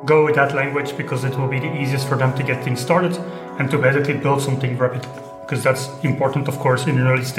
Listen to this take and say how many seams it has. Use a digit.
0